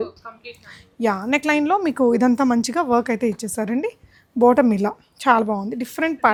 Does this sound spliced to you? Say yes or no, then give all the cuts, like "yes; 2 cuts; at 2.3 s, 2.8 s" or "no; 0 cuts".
no; 0 cuts